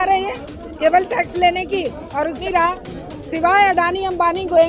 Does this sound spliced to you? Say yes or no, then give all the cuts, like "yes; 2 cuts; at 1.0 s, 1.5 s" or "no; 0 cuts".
yes; 1 cut; at 2.4 s